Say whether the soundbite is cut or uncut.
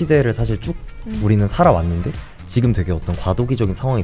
uncut